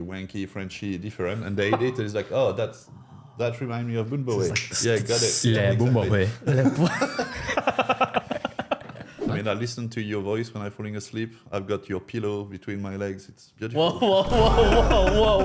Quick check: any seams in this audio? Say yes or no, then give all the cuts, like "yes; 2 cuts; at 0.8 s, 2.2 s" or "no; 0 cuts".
yes; 1 cut; at 9.2 s